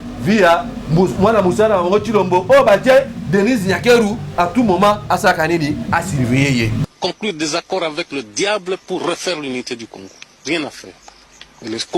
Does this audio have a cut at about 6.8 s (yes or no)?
yes